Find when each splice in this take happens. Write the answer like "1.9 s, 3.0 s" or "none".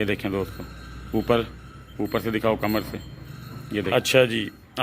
3.9 s